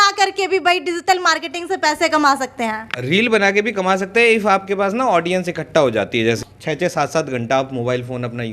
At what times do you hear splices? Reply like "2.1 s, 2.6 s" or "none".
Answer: 6.4 s